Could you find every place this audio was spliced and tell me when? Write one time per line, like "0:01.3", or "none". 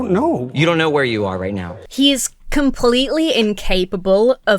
0:01.8